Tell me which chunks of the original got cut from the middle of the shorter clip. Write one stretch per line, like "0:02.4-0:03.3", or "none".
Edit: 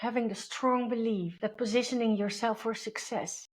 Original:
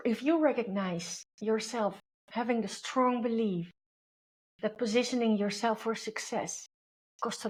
0:03.6-0:04.5

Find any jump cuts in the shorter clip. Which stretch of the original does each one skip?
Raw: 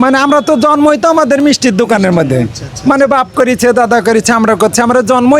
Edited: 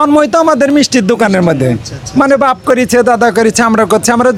none

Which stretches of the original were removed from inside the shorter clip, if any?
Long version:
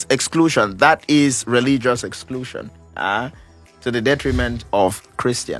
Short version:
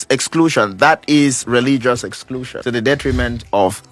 0:02.5-0:03.7

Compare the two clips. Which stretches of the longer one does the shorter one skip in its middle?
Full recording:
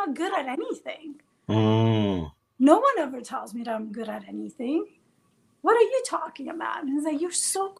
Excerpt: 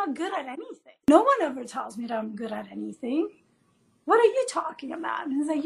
0:01.1-0:02.6

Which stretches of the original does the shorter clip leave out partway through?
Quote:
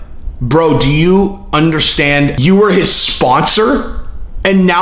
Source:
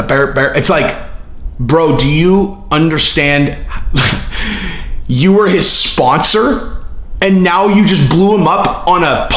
0:03.6-0:05.1

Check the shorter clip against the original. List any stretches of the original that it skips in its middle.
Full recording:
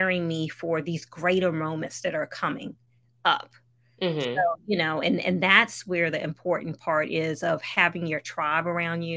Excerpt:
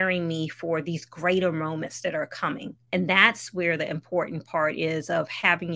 0:02.9-0:05.2

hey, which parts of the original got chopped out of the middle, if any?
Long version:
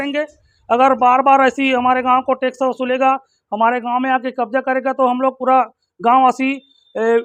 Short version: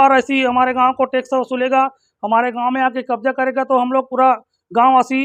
none

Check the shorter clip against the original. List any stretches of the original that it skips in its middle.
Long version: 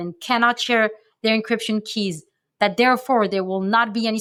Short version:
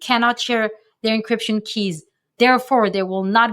0:02.6-0:02.7

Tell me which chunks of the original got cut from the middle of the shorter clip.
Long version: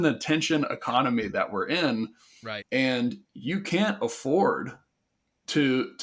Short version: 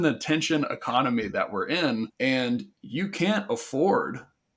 0:02.1-0:02.6

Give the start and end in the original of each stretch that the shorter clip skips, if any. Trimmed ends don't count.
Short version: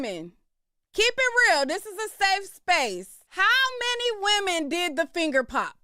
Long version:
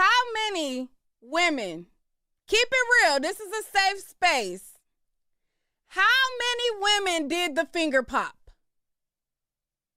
0:04.7-0:05.8

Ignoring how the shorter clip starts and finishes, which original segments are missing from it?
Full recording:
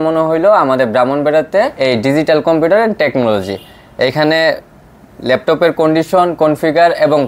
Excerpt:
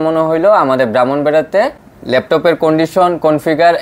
0:01.7-0:04.9

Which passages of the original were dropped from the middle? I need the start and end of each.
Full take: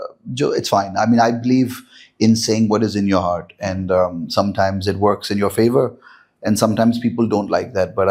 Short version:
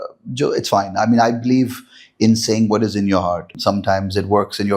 0:03.5-0:04.2

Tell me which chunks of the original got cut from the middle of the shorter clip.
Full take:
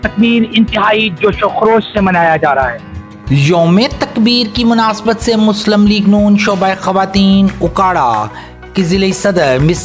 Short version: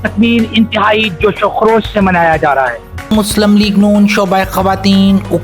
0:03.1-0:05.4

